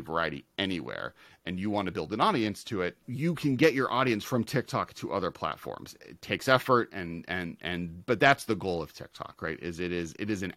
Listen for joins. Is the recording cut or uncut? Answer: cut